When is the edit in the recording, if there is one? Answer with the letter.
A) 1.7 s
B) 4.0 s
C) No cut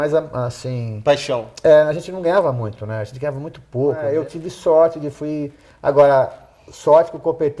B